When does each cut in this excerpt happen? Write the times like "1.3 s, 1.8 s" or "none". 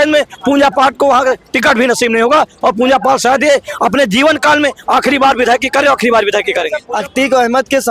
6.8 s